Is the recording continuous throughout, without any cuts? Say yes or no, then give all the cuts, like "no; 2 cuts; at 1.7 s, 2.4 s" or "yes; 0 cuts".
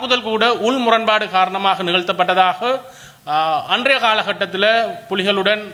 yes; 0 cuts